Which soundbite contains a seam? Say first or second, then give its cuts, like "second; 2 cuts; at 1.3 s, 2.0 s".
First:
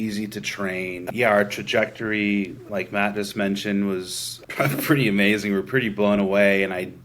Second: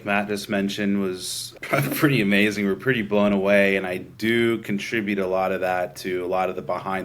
first; 1 cut; at 1.1 s